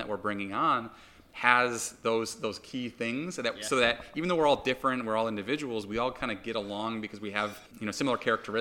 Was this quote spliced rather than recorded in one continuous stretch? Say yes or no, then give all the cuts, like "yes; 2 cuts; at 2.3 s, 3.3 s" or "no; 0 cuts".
yes; 1 cut; at 7.7 s